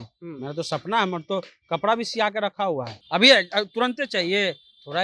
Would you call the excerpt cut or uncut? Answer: cut